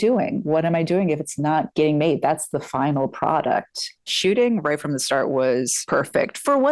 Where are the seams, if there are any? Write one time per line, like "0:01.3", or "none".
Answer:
0:04.1
0:05.8